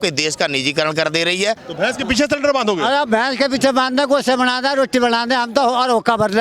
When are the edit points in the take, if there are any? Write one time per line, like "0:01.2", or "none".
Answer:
0:01.7